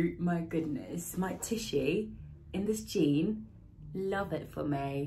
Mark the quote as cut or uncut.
uncut